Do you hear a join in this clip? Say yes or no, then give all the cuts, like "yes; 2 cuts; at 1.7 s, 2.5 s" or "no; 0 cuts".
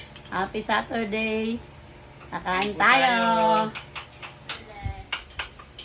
no; 0 cuts